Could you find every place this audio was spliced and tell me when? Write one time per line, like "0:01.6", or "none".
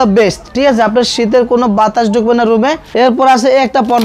0:02.8